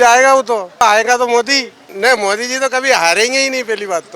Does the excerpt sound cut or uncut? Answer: cut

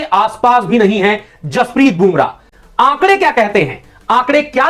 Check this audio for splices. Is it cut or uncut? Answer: cut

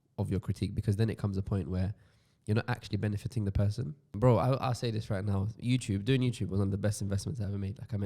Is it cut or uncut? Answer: cut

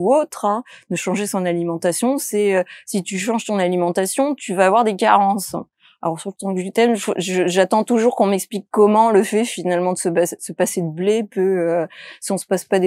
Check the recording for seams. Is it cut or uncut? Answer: uncut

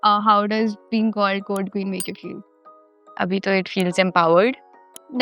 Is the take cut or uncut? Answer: uncut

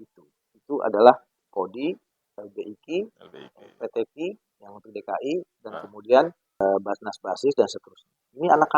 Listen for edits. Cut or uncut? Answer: cut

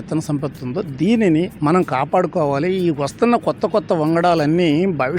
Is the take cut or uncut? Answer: cut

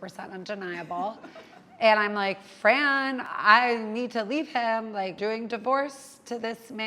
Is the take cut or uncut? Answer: cut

